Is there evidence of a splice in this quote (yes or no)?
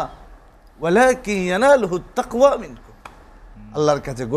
no